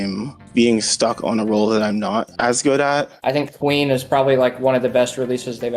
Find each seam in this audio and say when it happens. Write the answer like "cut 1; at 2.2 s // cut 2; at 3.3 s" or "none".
cut 1; at 3.1 s